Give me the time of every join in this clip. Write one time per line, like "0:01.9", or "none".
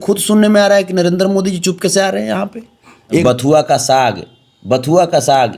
0:03.2